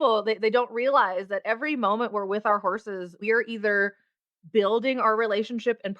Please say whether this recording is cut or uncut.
cut